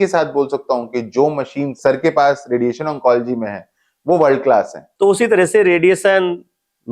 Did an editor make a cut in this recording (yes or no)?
yes